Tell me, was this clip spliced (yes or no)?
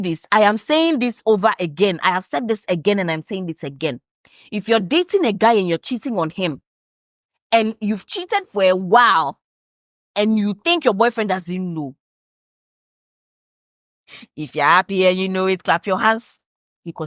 no